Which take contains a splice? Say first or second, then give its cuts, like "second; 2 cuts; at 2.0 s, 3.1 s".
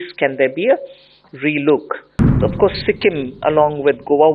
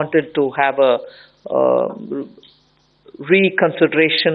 first; 1 cut; at 2.4 s